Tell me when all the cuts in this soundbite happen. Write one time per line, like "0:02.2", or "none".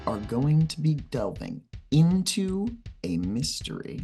none